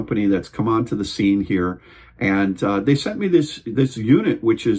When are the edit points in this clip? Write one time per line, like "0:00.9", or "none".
none